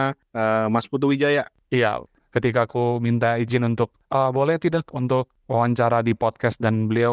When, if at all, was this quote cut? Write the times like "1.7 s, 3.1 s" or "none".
2.1 s, 5.4 s